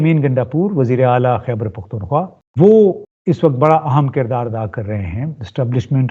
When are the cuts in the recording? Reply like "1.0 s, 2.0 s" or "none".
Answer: 2.4 s, 3.1 s